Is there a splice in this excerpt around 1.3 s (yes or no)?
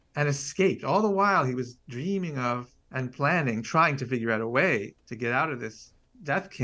no